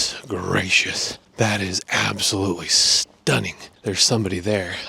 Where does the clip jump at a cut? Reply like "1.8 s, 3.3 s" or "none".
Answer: none